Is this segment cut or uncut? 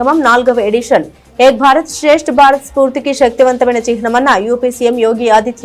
uncut